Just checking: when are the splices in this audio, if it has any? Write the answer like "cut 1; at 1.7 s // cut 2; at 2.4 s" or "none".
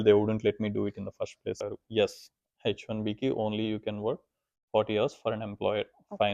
cut 1; at 1.6 s